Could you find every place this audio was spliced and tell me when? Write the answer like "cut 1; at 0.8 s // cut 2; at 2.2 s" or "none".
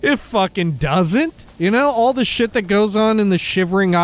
cut 1; at 1.4 s